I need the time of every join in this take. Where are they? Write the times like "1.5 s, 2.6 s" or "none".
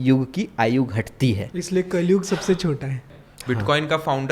3.2 s